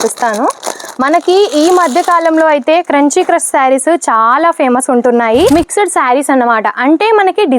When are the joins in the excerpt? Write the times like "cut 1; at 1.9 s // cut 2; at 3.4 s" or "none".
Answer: cut 1; at 5.5 s